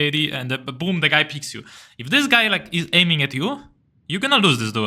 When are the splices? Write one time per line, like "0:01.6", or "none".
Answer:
none